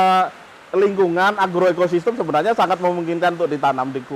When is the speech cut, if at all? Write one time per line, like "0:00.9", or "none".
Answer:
none